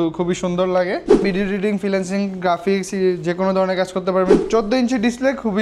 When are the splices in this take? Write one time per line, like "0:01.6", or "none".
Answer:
0:01.2
0:04.4